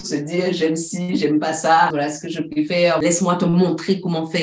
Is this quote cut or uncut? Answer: cut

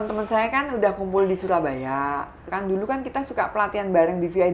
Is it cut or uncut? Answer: cut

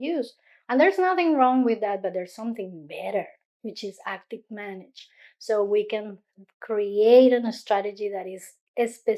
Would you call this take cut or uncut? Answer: uncut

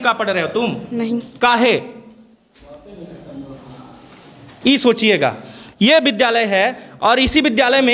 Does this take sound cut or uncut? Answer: uncut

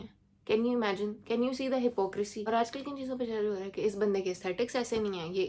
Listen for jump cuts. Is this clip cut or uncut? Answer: cut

